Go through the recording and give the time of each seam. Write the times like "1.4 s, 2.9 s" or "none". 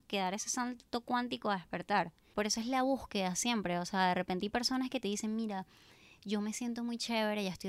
2.2 s